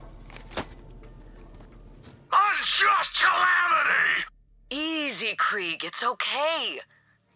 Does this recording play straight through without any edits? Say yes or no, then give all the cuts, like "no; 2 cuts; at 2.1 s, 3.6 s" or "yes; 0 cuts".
no; 1 cut; at 2.2 s